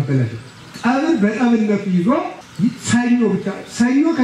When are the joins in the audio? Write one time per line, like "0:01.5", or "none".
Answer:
0:02.4